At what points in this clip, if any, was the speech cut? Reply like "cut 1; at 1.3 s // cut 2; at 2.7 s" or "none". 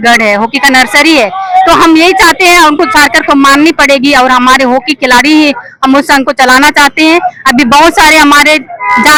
none